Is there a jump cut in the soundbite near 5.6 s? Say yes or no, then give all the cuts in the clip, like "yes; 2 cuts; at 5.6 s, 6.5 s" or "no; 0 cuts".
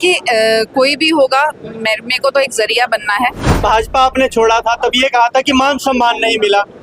no; 1 cut; at 3.5 s